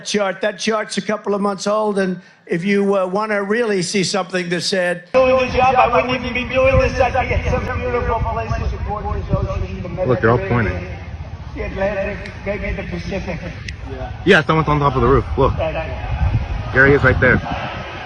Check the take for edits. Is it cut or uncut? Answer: cut